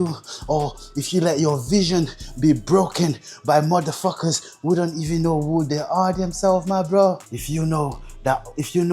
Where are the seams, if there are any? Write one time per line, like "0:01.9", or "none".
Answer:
0:07.2

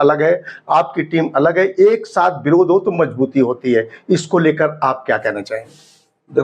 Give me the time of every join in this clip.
none

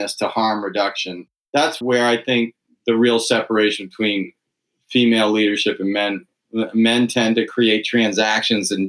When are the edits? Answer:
0:01.5

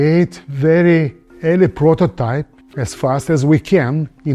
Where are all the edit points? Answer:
none

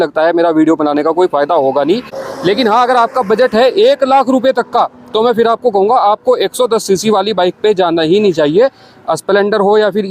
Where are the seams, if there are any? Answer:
0:02.2

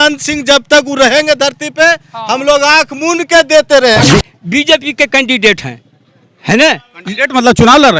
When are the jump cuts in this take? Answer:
0:04.1

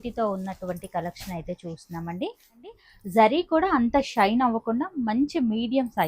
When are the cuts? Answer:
0:02.6

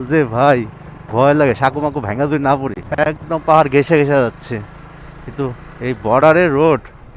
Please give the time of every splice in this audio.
0:03.2

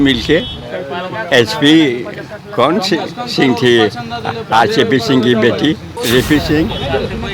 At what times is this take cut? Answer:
0:05.9

